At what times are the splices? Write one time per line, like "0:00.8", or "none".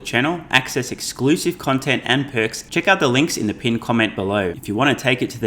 0:02.6
0:04.6

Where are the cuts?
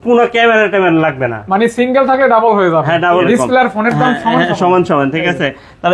0:03.2

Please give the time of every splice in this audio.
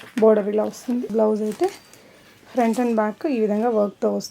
0:01.1

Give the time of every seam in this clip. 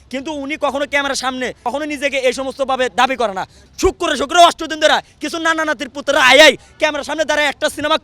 0:01.6
0:03.7

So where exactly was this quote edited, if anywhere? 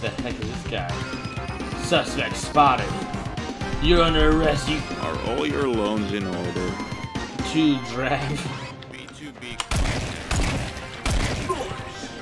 none

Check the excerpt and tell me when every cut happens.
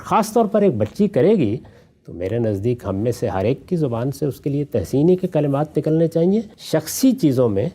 0:06.6

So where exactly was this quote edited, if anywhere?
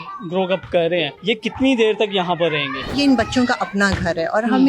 0:01.1
0:02.9

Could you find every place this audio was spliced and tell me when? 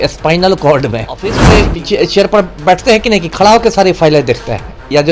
0:01.5

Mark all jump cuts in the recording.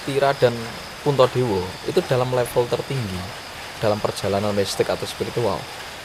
none

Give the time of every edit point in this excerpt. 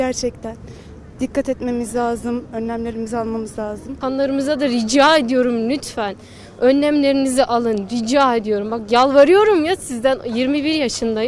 0:03.9

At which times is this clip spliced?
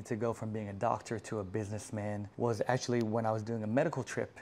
0:02.3

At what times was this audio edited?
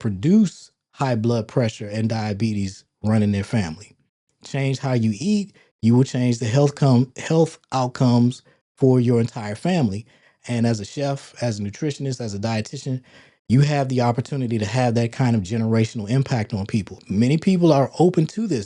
0:17.0

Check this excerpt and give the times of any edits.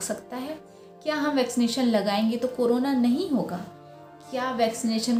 none

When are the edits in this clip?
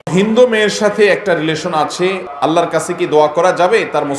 0:02.2

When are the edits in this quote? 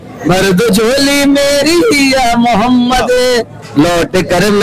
none

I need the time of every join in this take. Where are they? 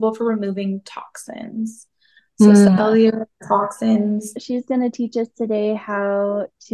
0:04.4

